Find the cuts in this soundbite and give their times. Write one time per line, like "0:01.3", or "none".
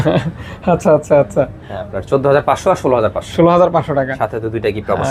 none